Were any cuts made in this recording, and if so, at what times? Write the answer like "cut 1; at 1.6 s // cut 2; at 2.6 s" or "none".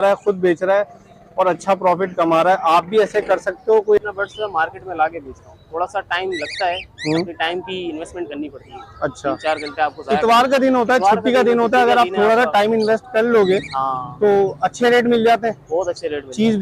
cut 1; at 4.0 s